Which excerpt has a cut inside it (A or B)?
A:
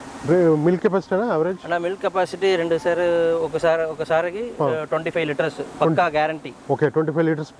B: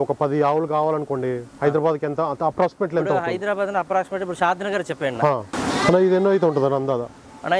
B